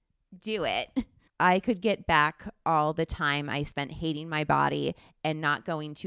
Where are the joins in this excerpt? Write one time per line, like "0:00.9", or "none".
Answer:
0:01.2